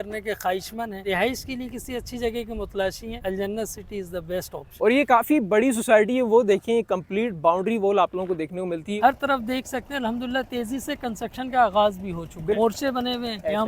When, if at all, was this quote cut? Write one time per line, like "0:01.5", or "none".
0:01.0
0:03.2
0:04.7
0:08.9
0:12.6

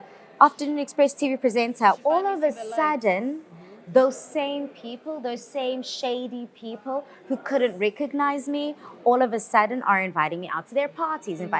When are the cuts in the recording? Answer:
0:02.0

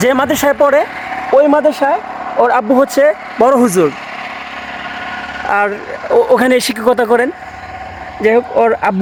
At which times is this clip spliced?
none

